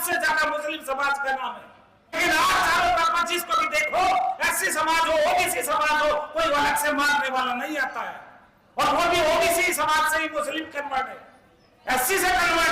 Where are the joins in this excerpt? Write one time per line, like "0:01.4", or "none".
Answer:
0:02.2